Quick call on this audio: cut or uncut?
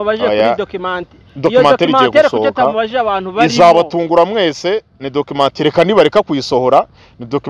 uncut